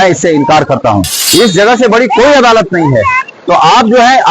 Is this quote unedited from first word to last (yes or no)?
no